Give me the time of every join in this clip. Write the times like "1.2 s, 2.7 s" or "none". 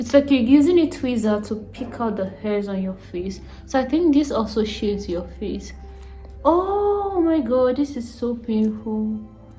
none